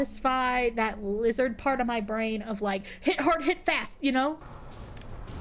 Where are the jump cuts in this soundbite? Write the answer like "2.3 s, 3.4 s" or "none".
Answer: 4.4 s

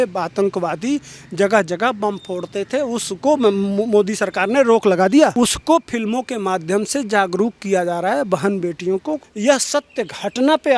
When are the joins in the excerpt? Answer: 5.3 s, 9.3 s

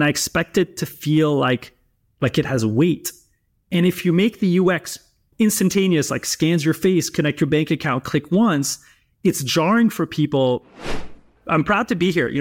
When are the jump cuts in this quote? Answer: 10.7 s

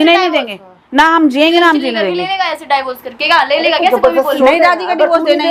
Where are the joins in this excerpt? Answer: none

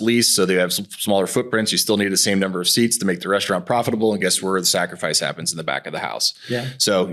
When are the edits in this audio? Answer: none

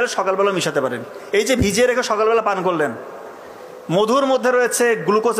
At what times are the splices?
none

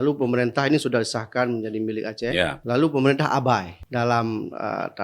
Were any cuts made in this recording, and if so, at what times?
2.6 s, 3.8 s

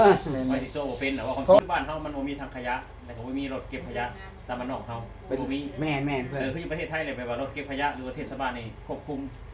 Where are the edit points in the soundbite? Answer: 1.6 s

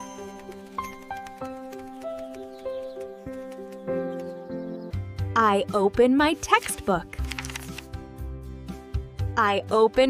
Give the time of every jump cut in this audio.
4.8 s

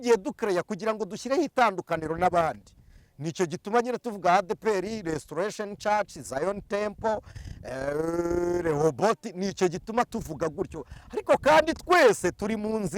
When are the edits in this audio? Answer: none

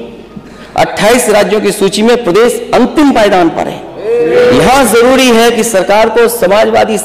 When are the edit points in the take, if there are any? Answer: 4.3 s

